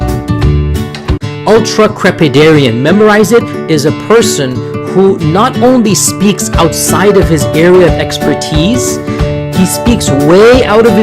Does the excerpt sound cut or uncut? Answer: cut